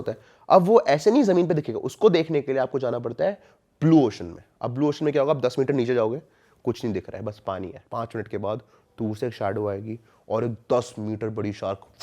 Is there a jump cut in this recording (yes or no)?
yes